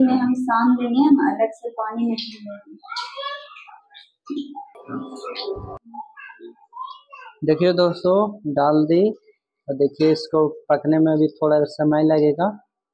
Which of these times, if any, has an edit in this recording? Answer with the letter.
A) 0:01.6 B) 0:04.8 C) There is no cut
B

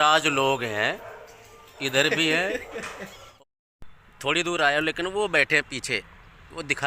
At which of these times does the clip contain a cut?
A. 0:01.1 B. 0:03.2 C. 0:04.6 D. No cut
B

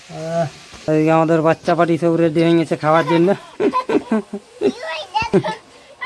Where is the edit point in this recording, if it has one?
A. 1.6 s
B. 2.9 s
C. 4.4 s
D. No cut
D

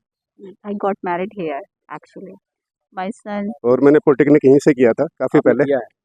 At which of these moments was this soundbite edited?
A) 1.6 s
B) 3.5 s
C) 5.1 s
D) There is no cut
B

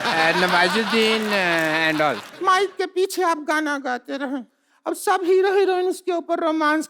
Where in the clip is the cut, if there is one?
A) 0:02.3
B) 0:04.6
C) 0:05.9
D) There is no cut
A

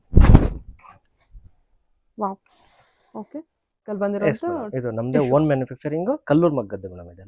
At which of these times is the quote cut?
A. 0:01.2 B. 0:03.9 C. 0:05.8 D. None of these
B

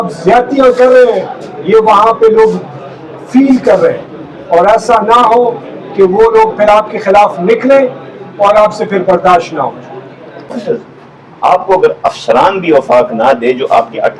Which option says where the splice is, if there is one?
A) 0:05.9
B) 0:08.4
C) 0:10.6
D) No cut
C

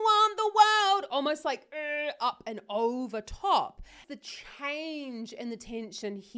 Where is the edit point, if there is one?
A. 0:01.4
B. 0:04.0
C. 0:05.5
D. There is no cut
B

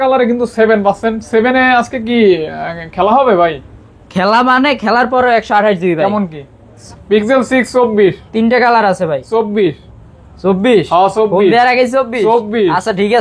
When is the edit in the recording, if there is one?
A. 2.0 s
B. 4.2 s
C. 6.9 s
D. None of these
C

